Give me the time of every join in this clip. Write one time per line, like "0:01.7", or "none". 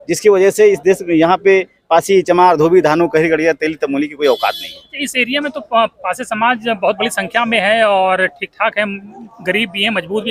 none